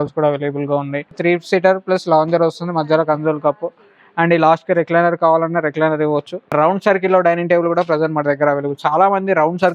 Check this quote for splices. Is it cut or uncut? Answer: cut